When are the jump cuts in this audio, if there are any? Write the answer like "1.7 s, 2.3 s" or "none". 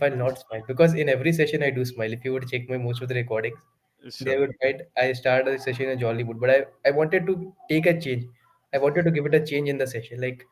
none